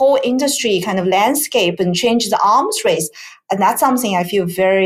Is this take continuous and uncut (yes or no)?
yes